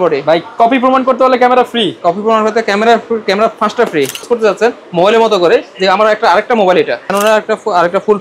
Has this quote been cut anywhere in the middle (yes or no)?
yes